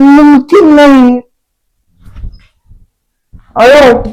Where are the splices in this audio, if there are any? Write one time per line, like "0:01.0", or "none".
none